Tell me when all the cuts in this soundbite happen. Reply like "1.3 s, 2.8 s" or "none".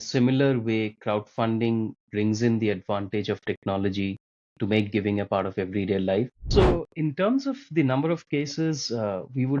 6.4 s